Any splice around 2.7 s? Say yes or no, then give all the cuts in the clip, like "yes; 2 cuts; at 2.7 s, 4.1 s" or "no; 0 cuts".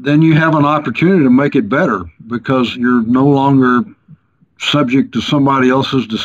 yes; 1 cut; at 2.7 s